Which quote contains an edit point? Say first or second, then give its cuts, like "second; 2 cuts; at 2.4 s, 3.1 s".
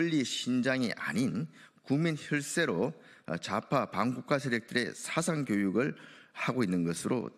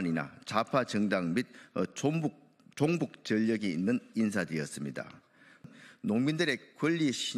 second; 1 cut; at 5.7 s